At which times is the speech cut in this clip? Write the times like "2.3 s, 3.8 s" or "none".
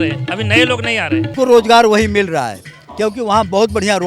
1.3 s